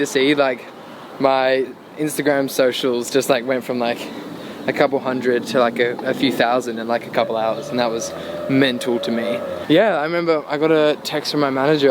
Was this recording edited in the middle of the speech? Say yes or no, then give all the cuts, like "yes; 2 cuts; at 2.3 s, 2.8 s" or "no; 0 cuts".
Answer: yes; 1 cut; at 9.5 s